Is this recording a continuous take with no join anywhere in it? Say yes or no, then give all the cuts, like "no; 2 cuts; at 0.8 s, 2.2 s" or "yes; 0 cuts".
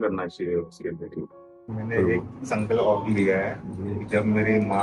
no; 1 cut; at 1.7 s